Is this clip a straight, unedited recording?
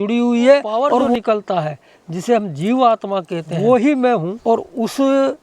no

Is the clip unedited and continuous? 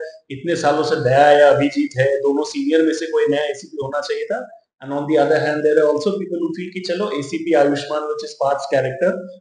yes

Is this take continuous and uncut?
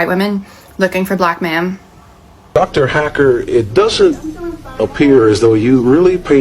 no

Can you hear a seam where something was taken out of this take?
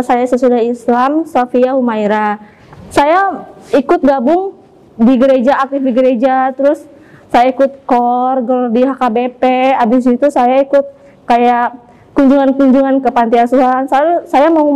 yes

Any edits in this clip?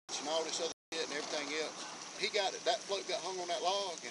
yes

